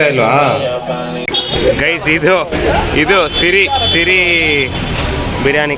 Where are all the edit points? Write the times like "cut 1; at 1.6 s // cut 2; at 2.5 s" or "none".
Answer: cut 1; at 1.3 s